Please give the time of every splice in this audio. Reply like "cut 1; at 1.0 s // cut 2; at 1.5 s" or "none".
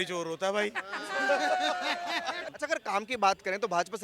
cut 1; at 2.5 s